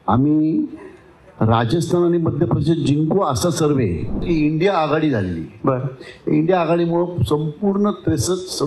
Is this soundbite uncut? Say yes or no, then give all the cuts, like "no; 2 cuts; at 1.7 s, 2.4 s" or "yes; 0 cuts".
no; 1 cut; at 4.2 s